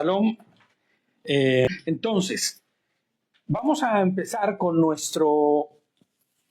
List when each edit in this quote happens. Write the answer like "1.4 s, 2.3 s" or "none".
1.7 s